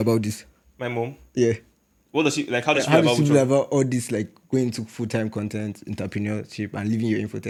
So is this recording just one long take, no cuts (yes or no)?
yes